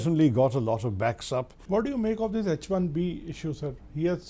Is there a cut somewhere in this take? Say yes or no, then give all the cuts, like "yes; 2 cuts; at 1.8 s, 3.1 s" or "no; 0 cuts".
yes; 1 cut; at 1.5 s